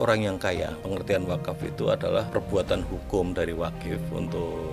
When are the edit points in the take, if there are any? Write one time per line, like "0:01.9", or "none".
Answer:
0:00.8
0:02.3